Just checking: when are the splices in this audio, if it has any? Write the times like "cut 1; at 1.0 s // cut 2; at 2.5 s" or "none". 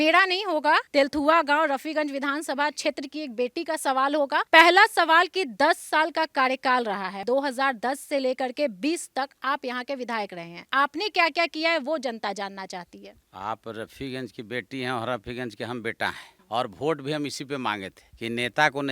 none